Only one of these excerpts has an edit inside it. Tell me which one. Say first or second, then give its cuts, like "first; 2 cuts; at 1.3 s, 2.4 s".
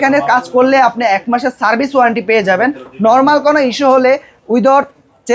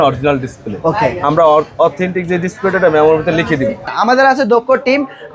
second; 1 cut; at 3.8 s